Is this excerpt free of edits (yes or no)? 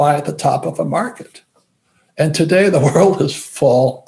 yes